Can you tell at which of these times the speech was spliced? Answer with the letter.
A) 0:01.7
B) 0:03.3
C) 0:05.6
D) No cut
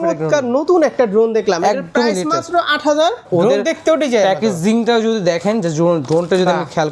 B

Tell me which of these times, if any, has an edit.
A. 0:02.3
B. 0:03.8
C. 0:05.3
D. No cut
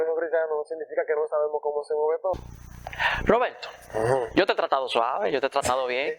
A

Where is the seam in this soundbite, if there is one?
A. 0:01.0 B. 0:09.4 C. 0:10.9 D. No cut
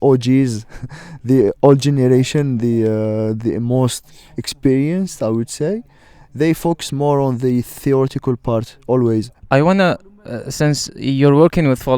B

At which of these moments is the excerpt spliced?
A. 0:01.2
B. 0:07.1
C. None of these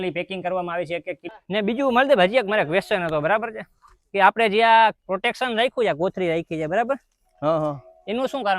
A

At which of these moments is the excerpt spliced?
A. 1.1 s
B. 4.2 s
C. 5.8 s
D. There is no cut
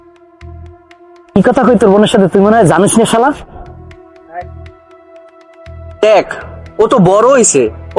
D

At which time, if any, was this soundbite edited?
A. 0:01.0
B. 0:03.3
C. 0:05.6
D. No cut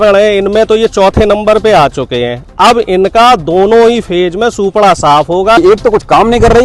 C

